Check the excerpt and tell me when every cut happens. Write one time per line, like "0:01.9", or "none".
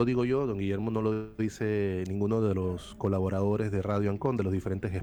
none

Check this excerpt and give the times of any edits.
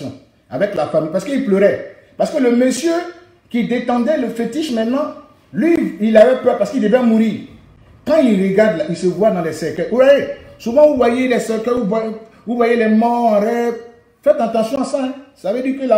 none

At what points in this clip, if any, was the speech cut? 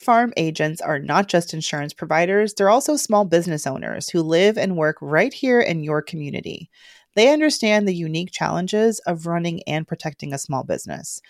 none

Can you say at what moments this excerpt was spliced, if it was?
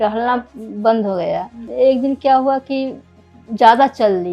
0:01.6

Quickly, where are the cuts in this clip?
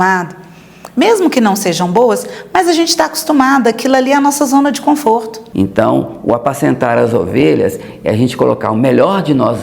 0:05.4

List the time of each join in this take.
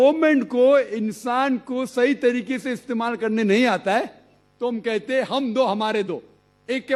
none

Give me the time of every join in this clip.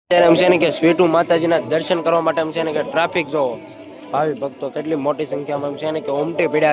none

